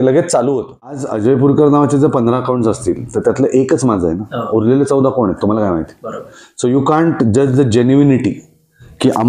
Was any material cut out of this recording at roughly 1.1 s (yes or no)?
yes